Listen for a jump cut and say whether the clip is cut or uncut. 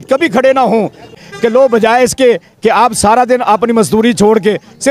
cut